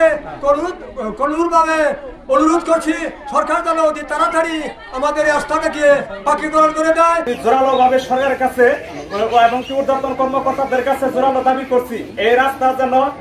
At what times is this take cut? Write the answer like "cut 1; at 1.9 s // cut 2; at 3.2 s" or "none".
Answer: cut 1; at 7.3 s